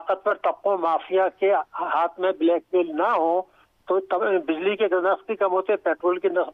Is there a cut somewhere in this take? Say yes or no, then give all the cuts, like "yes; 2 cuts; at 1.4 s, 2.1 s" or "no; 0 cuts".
no; 0 cuts